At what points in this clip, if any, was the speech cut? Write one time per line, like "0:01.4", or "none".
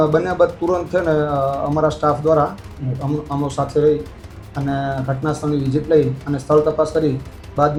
none